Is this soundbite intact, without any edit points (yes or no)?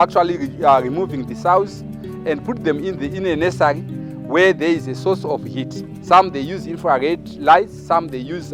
yes